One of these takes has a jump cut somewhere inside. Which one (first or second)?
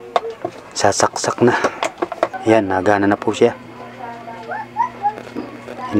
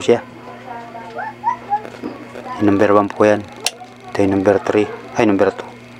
first